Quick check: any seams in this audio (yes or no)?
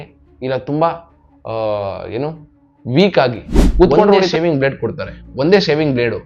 yes